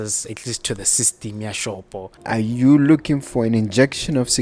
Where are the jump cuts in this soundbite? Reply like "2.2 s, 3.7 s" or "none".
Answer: 2.1 s